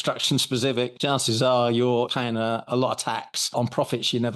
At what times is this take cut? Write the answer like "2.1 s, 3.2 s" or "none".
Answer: 0.9 s, 2.1 s, 3.3 s